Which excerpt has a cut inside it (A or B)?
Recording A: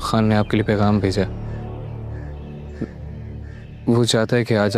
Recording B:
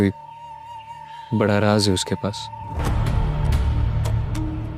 A